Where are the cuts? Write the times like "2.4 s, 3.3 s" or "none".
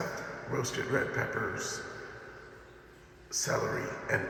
none

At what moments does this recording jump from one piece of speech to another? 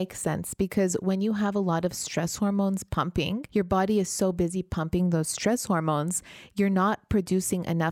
3.4 s

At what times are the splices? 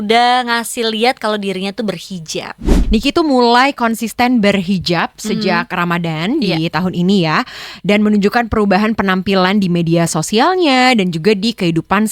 2.7 s

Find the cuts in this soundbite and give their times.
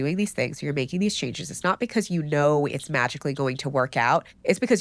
none

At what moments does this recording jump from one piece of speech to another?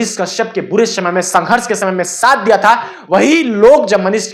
none

